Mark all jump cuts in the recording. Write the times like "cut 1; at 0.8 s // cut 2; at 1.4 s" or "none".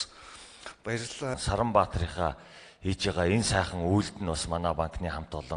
cut 1; at 1.4 s